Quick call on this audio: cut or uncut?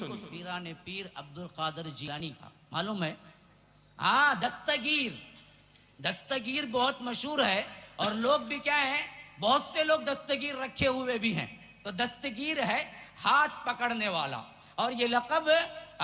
cut